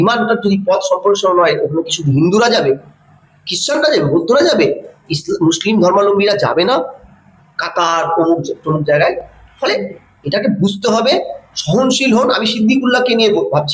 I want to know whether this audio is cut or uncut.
uncut